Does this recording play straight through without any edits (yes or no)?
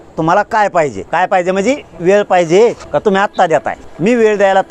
no